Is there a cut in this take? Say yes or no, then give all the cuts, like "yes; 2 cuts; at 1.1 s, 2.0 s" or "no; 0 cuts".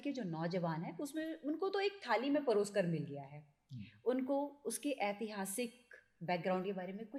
no; 0 cuts